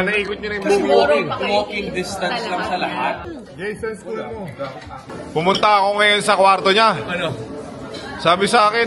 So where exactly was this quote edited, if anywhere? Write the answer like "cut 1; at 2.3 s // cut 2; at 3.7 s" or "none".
cut 1; at 3.3 s // cut 2; at 5.2 s